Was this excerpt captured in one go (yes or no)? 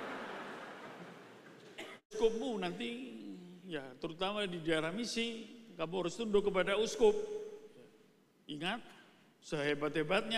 no